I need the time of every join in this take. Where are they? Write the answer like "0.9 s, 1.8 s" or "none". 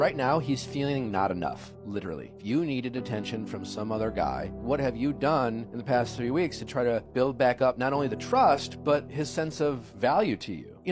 2.2 s